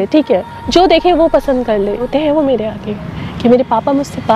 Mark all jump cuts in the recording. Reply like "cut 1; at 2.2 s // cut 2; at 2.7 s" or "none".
cut 1; at 2.1 s